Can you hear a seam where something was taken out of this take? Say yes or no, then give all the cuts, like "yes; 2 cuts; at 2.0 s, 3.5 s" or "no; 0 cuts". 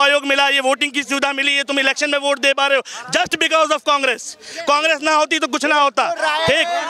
no; 0 cuts